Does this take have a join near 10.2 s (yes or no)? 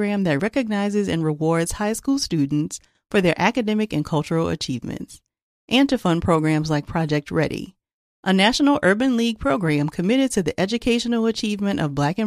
no